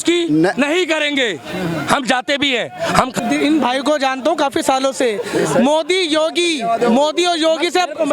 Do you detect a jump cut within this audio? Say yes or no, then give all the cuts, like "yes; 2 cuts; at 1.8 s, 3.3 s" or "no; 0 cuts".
yes; 1 cut; at 3.1 s